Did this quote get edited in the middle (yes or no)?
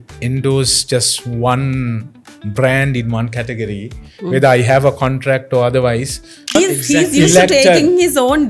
yes